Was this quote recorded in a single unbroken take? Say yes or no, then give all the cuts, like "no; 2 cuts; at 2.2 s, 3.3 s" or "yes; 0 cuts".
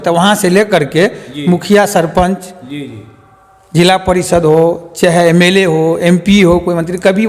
yes; 0 cuts